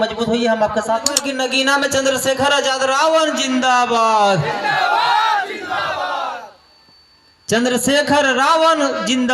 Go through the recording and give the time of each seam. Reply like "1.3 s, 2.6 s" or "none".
1.2 s